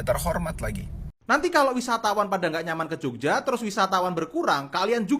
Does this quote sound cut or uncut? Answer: cut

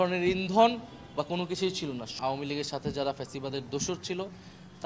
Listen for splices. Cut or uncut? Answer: cut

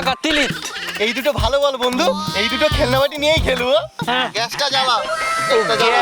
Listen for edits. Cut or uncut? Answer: cut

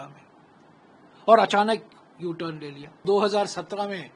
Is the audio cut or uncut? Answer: cut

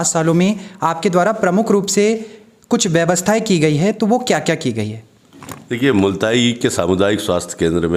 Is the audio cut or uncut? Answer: uncut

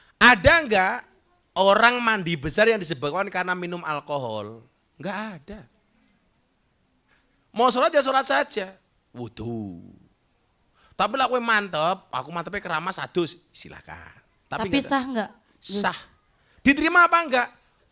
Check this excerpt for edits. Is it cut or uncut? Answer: uncut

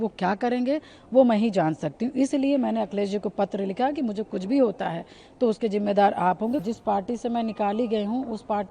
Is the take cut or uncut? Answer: cut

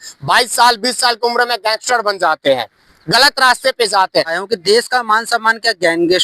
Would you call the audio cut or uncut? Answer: cut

